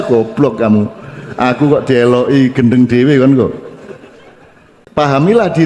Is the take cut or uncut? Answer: cut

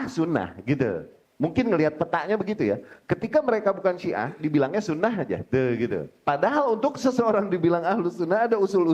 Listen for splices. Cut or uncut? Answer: cut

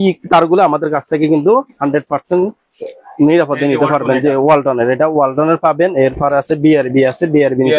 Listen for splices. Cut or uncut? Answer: uncut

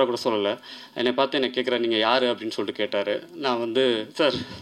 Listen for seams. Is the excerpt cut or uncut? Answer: uncut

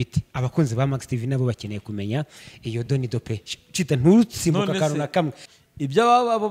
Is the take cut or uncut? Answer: cut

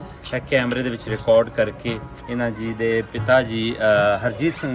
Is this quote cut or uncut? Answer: uncut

